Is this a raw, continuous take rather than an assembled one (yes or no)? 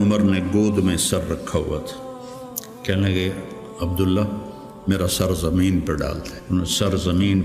no